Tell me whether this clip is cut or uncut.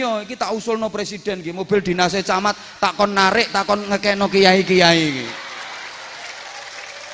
uncut